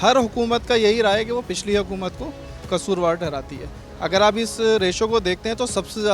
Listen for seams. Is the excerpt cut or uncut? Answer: uncut